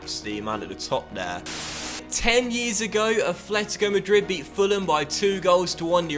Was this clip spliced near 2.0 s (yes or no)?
yes